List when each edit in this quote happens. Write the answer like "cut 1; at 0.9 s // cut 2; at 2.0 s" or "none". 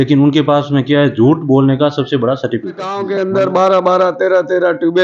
cut 1; at 3.0 s

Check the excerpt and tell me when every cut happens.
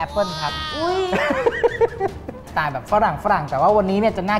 cut 1; at 2.4 s

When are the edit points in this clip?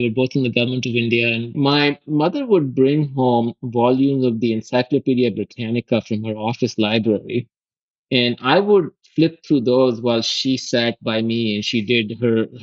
cut 1; at 1.5 s

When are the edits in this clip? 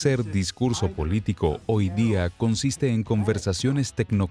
cut 1; at 2.8 s

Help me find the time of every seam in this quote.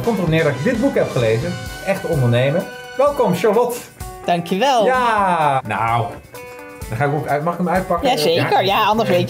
cut 1; at 2.8 s // cut 2; at 5.6 s

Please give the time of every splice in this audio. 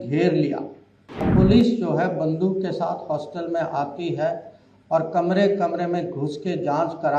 cut 1; at 1.3 s

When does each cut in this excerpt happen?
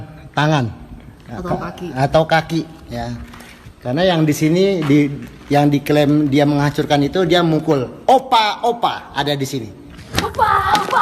cut 1; at 10.1 s

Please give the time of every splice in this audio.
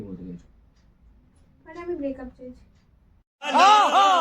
none

